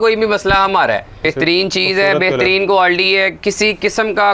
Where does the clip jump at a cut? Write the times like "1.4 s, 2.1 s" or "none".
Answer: 1.3 s

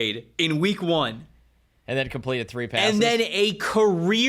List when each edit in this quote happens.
none

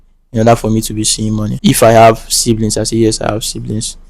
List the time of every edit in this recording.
1.5 s

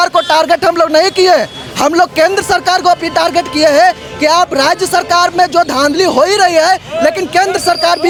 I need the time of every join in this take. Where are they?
none

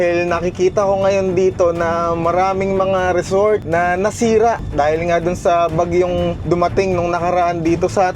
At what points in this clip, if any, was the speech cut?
3.6 s, 4.7 s, 6.4 s

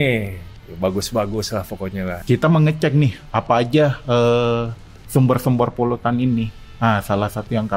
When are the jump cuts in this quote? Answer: 2.2 s

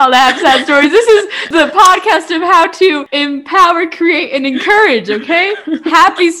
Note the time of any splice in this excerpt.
1.5 s, 3.1 s

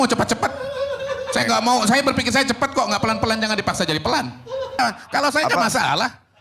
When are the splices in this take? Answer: 4.8 s

